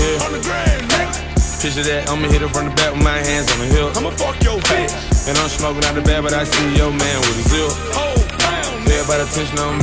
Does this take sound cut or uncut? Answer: uncut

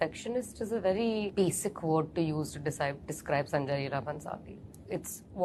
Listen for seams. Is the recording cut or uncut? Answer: uncut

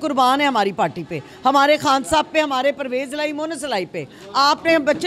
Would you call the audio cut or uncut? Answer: uncut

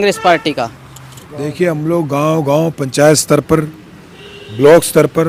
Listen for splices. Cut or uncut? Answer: uncut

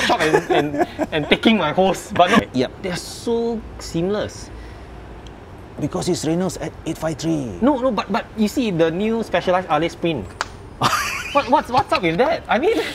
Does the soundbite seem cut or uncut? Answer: cut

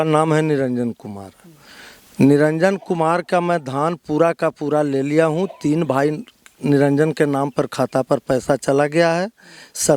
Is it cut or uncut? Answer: uncut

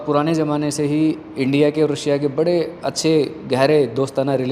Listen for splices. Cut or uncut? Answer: uncut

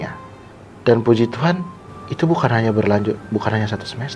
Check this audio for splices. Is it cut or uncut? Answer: uncut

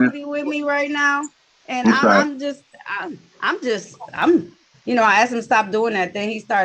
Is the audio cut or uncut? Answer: uncut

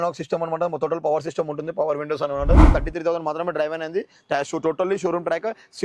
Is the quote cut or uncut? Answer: cut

